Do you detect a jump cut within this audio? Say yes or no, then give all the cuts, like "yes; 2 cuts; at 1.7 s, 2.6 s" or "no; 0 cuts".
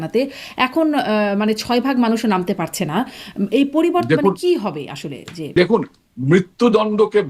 yes; 1 cut; at 5.5 s